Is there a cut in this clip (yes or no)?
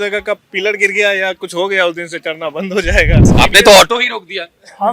yes